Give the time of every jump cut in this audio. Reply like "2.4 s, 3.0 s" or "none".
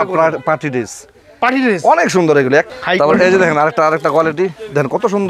2.7 s